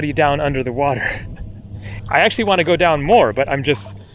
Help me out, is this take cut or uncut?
cut